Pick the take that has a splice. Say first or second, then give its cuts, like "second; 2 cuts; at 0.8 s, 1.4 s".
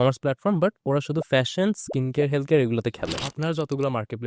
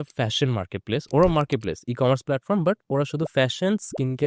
first; 1 cut; at 3.2 s